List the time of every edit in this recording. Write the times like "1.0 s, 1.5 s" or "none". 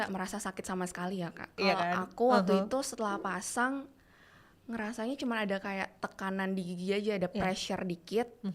1.5 s